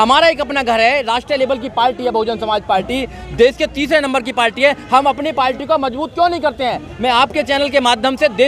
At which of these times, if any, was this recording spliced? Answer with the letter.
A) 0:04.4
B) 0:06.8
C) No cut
C